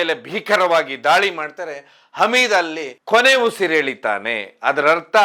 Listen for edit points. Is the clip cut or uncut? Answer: uncut